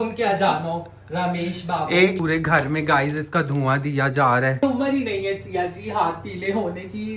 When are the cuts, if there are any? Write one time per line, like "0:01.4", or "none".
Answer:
0:02.2
0:04.6